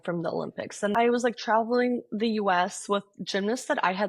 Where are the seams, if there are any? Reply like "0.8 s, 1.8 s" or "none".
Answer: 0.9 s